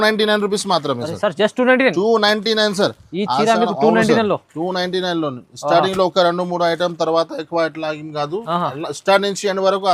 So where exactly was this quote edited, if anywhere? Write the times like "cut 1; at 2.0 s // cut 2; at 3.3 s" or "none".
none